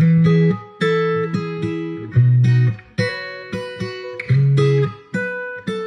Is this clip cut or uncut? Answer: uncut